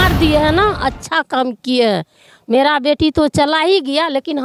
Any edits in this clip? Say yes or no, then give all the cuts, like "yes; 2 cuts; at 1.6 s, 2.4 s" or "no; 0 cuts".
no; 0 cuts